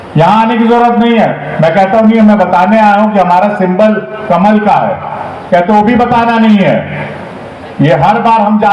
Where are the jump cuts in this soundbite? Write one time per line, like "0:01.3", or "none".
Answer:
none